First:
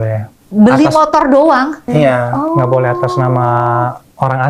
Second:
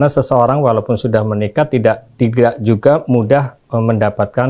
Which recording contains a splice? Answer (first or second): first